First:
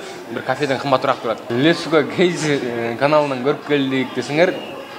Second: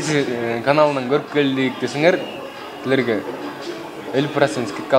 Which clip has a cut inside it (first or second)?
first